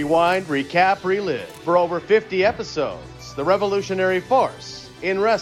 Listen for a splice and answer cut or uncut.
uncut